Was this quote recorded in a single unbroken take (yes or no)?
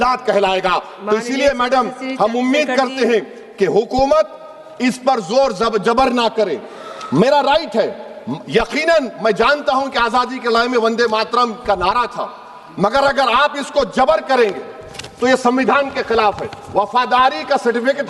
yes